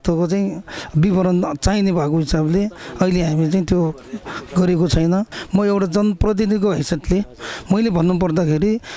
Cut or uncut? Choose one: cut